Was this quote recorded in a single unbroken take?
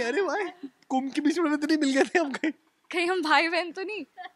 yes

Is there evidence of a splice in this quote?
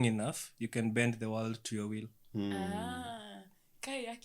no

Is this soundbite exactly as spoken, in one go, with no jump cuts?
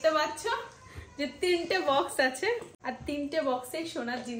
no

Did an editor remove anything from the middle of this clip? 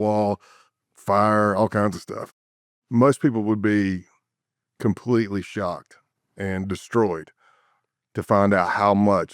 yes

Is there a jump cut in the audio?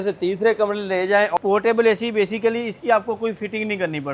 yes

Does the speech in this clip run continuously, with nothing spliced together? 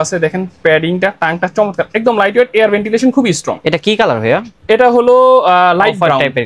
yes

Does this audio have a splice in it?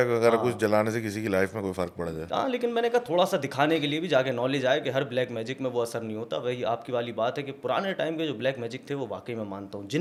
no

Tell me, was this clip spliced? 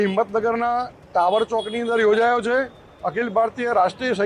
no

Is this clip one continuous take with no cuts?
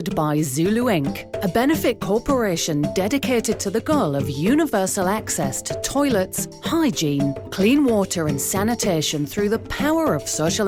yes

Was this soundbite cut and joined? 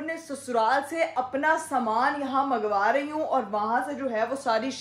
no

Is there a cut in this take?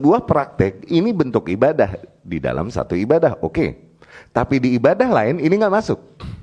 no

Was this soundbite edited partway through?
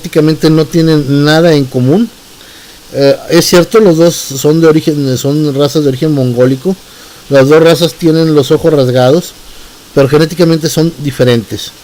no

